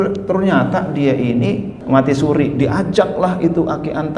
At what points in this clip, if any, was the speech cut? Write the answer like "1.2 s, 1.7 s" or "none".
1.7 s